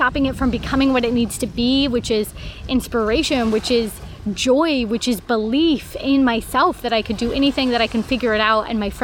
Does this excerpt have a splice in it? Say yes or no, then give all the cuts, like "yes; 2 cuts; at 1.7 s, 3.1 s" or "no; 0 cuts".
no; 0 cuts